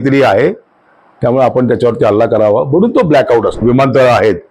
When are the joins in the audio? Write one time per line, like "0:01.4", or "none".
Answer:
0:03.6